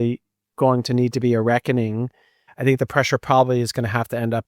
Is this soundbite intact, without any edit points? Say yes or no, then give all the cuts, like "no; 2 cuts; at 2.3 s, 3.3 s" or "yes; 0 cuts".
no; 1 cut; at 2.4 s